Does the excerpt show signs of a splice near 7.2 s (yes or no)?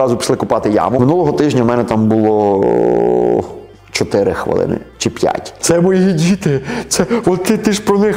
no